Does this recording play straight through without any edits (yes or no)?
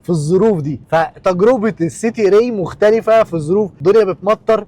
no